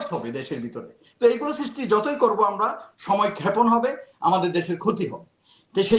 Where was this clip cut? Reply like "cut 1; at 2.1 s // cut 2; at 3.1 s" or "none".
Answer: none